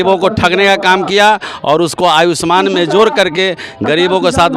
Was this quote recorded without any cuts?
yes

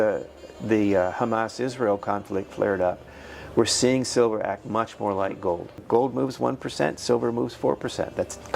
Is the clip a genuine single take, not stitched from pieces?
no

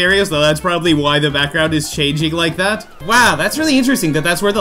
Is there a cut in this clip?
yes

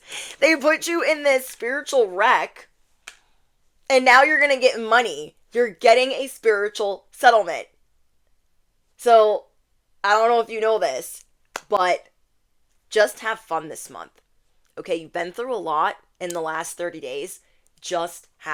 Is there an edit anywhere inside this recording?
no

